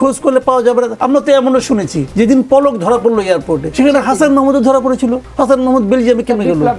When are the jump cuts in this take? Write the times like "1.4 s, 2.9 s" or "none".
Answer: 0.9 s, 2.0 s, 3.6 s, 5.3 s